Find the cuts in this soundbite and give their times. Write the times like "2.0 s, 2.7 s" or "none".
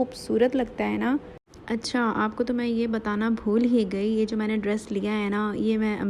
none